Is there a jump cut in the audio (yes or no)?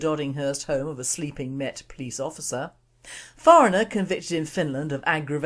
yes